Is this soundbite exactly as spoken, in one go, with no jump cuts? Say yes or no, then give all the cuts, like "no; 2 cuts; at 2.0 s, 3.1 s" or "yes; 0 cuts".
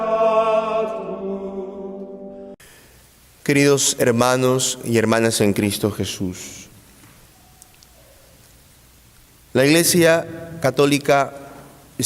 yes; 0 cuts